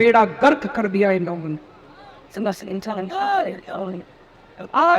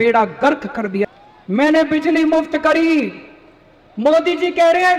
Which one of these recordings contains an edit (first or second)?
second